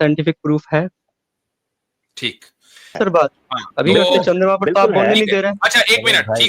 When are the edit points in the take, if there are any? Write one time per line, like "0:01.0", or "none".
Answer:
0:02.9